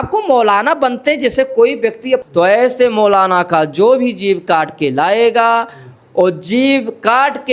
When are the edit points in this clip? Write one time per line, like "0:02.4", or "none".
0:02.2